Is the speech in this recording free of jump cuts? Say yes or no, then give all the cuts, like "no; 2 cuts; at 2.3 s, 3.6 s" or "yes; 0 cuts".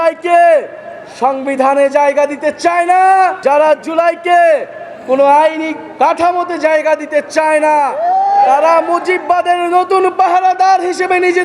no; 2 cuts; at 3.4 s, 8.0 s